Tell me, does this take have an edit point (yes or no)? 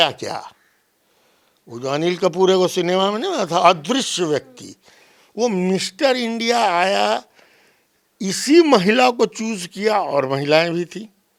no